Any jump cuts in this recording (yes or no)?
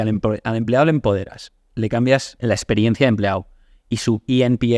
yes